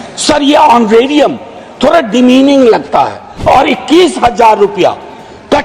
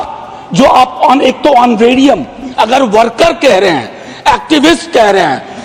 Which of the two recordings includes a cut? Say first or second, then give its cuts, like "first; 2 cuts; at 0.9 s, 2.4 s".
first; 1 cut; at 3.2 s